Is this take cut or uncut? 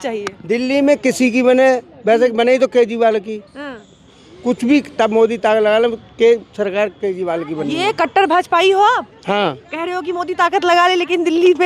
uncut